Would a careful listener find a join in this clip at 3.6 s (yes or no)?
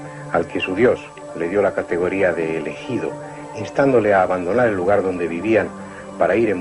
yes